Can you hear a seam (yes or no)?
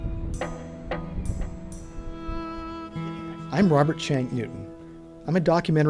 yes